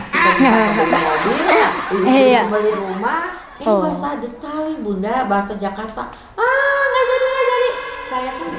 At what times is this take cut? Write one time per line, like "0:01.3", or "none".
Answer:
0:03.4

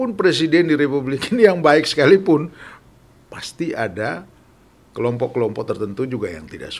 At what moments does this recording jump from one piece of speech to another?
none

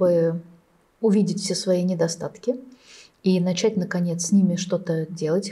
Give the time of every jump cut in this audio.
none

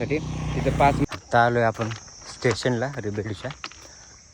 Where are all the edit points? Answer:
0:01.0

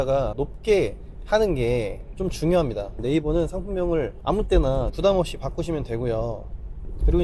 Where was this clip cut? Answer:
0:03.0
0:04.9

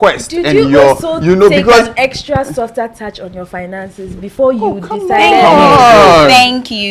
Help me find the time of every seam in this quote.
none

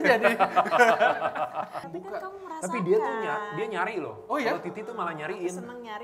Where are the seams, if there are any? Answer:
0:01.8

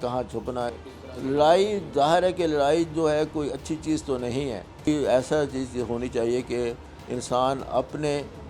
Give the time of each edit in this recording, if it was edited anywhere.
0:00.8
0:04.9

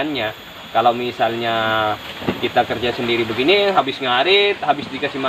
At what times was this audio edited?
none

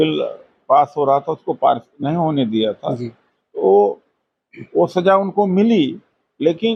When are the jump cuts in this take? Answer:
none

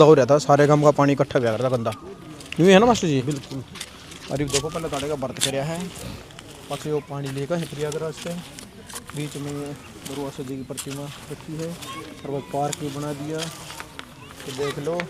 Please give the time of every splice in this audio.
none

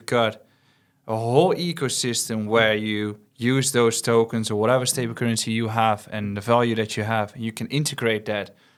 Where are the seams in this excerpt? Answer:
none

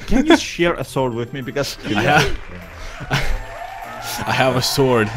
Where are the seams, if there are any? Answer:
none

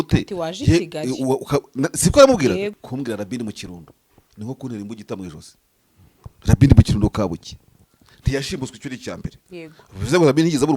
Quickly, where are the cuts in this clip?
0:02.9

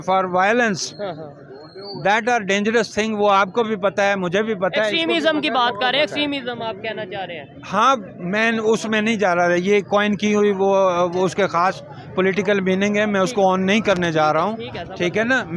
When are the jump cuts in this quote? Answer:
none

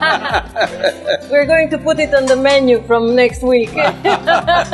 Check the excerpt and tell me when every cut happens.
0:01.3

